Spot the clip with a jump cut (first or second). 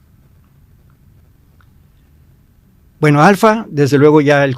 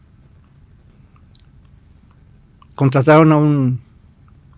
second